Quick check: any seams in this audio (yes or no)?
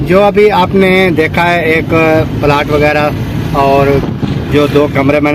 no